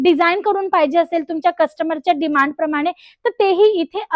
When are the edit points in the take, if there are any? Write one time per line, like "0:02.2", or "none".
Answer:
none